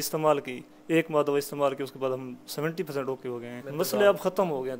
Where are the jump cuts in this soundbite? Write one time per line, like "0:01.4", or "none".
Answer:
0:03.7